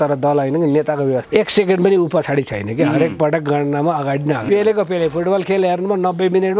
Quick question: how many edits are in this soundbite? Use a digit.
2